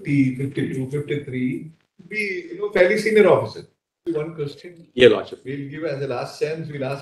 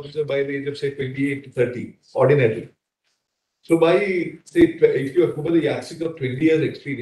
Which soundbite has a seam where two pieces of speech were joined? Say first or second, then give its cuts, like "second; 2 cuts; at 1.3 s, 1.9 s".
first; 1 cut; at 4.0 s